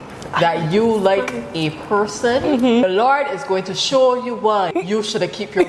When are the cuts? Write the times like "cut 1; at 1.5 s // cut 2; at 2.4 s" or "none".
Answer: cut 1; at 2.8 s // cut 2; at 4.7 s

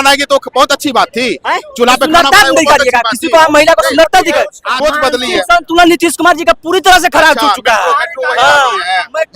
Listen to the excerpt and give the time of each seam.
cut 1; at 4.7 s

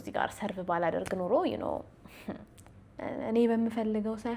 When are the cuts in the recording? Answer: cut 1; at 2.6 s

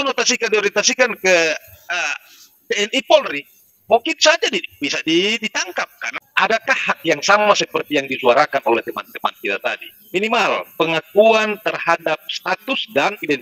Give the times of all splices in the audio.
cut 1; at 6.0 s

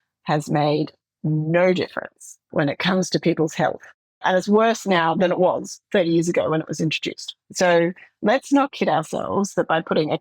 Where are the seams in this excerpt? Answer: cut 1; at 2.5 s // cut 2; at 4.2 s // cut 3; at 5.1 s

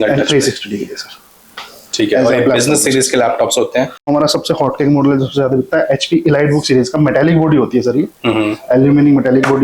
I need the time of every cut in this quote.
cut 1; at 4.0 s

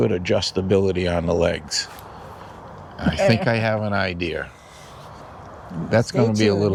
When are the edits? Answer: none

